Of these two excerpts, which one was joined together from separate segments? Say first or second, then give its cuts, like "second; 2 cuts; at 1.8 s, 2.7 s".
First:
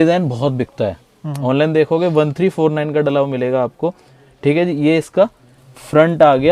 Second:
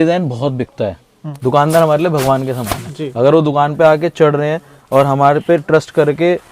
second; 1 cut; at 1.3 s